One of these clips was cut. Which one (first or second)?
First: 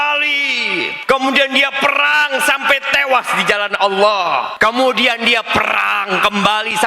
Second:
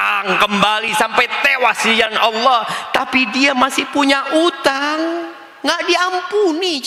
first